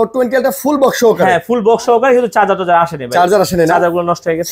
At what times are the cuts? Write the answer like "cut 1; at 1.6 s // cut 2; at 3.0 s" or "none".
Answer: none